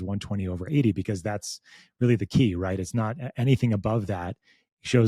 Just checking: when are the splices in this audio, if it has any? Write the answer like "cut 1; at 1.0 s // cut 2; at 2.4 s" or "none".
none